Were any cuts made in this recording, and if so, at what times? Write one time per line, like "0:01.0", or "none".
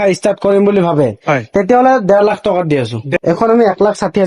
0:03.1